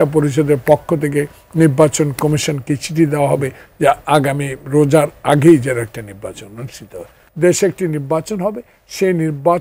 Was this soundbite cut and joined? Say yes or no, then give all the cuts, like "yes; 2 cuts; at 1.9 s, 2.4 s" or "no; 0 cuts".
yes; 1 cut; at 7.2 s